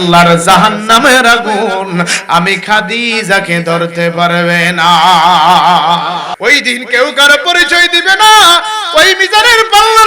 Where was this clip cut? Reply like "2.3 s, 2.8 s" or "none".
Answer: 6.3 s